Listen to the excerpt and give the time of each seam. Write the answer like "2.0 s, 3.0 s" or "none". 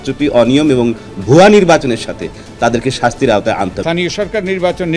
3.8 s